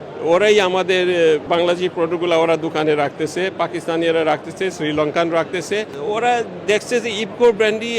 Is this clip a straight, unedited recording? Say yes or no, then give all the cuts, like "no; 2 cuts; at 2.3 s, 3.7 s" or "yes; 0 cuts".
no; 2 cuts; at 1.4 s, 6.3 s